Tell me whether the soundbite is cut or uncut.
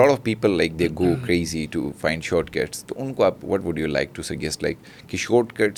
uncut